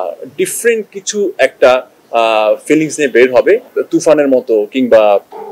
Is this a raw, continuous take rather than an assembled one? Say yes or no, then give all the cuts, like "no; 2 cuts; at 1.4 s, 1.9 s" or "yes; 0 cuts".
no; 1 cut; at 3.7 s